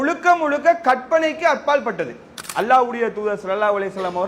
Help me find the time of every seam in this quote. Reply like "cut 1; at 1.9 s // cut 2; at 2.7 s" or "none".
cut 1; at 2.4 s

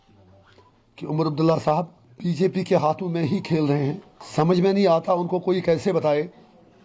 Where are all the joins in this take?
cut 1; at 2.0 s // cut 2; at 4.1 s

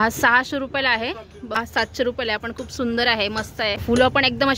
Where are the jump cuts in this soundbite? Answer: cut 1; at 1.6 s // cut 2; at 3.8 s

